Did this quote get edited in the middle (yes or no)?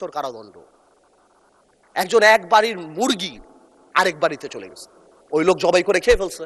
no